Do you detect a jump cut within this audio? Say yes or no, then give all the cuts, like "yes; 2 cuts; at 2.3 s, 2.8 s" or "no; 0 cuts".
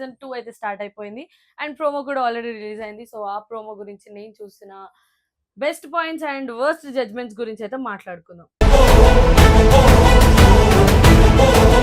no; 0 cuts